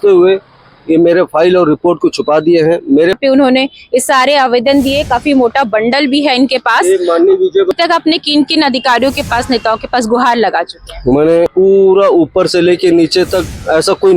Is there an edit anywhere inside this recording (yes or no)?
yes